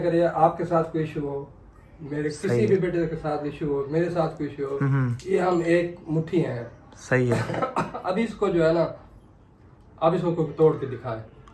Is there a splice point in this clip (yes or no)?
no